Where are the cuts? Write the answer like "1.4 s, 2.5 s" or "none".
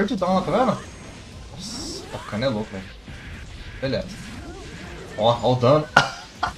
none